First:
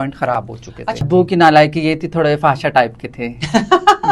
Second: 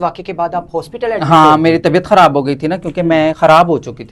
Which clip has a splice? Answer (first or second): first